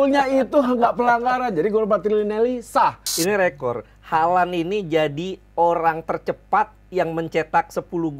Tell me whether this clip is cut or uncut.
cut